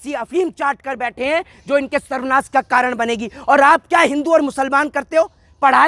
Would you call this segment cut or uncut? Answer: uncut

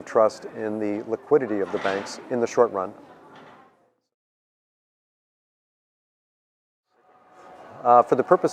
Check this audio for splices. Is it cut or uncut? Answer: uncut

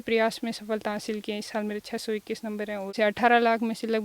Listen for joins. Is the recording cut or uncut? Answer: cut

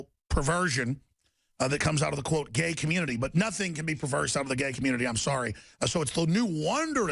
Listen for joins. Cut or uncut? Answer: uncut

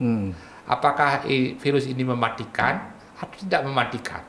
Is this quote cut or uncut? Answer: uncut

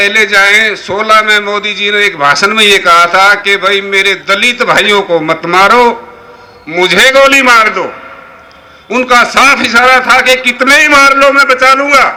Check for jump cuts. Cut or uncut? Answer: uncut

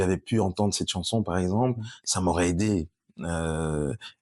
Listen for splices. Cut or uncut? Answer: uncut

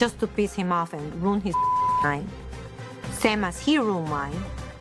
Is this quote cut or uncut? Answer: uncut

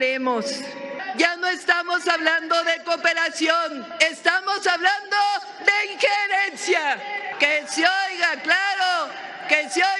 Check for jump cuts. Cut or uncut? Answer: cut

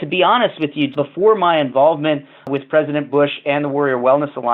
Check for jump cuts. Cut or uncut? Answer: cut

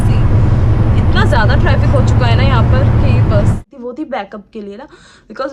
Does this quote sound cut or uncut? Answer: cut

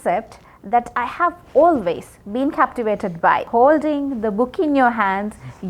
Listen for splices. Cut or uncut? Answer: cut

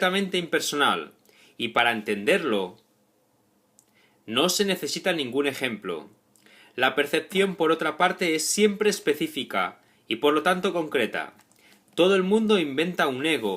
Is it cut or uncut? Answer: cut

